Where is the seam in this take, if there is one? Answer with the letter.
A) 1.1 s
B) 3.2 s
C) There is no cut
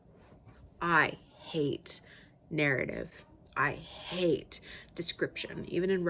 C